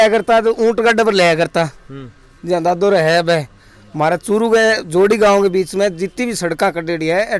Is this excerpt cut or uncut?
uncut